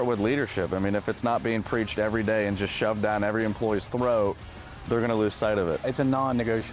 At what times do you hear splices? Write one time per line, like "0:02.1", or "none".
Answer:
0:05.8